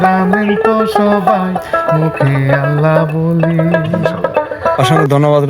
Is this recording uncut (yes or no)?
no